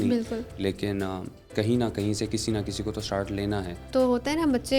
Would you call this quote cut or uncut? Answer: cut